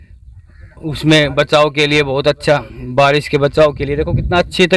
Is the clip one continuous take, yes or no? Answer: yes